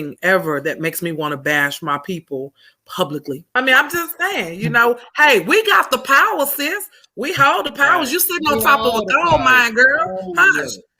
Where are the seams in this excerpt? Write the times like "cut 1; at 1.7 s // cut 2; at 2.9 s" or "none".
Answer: cut 1; at 3.4 s